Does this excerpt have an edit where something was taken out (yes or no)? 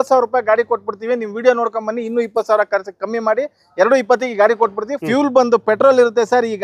yes